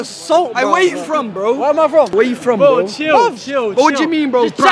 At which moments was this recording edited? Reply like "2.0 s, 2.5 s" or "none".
none